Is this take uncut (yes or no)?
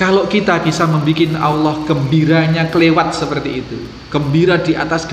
yes